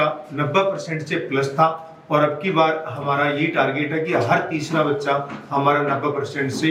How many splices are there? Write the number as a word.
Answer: zero